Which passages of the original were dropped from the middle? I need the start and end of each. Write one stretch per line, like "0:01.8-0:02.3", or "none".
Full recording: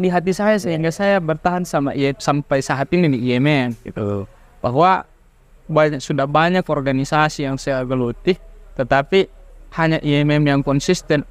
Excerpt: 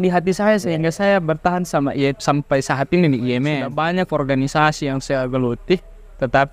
0:03.7-0:06.2